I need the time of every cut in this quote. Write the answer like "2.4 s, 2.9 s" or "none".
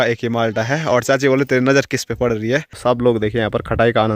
2.8 s

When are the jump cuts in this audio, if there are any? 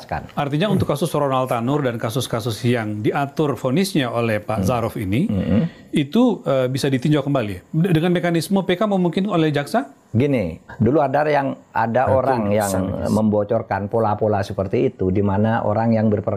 10.6 s

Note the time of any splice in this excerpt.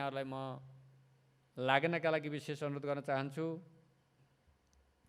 4.2 s

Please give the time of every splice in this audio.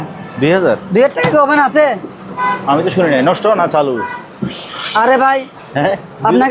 none

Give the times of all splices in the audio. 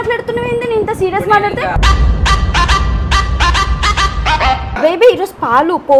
4.8 s

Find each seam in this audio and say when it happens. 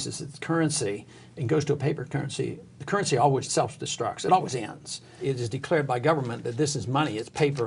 3.5 s, 5.2 s

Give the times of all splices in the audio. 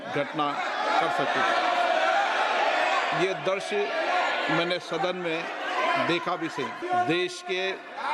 6.8 s

